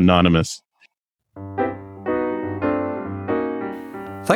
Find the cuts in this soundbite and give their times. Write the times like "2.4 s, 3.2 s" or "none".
1.0 s